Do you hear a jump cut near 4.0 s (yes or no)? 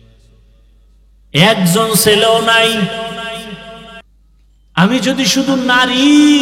yes